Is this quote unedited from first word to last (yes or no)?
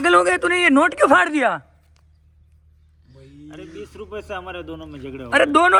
yes